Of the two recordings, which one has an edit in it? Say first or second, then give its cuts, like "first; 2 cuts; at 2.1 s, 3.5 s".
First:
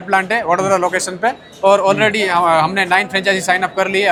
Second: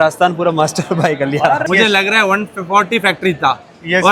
second; 1 cut; at 1.6 s